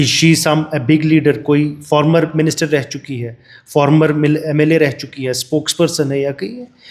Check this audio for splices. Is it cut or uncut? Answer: uncut